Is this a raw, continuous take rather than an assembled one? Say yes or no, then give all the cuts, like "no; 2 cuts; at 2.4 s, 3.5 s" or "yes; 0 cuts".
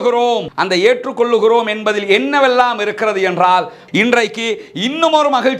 no; 1 cut; at 3.8 s